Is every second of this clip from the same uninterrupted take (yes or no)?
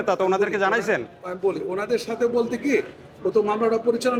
yes